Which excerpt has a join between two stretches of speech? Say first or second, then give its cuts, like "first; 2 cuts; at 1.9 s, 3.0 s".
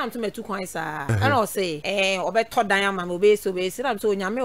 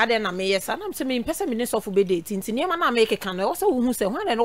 first; 2 cuts; at 1.0 s, 1.8 s